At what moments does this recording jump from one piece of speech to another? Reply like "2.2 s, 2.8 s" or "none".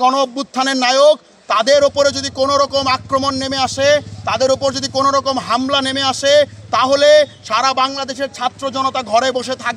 none